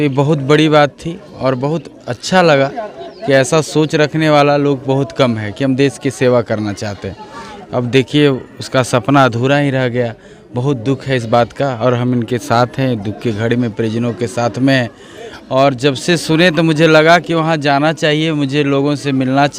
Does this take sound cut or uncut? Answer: uncut